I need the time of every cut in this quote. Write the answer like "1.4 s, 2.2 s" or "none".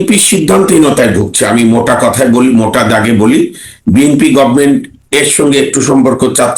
none